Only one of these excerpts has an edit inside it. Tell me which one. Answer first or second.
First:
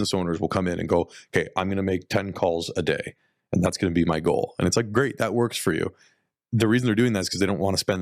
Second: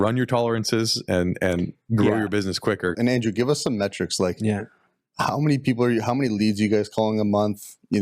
second